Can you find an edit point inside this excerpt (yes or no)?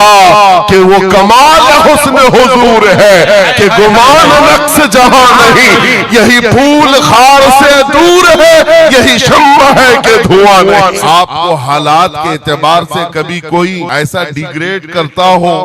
yes